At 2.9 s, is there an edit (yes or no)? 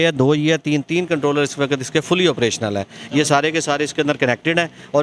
no